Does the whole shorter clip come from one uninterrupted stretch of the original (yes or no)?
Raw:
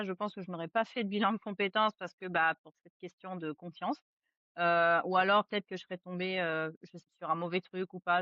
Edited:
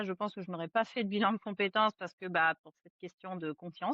yes